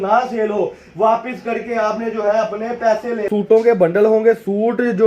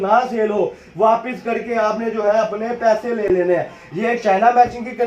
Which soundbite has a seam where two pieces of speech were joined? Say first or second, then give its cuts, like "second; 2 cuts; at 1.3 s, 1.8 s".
first; 1 cut; at 3.2 s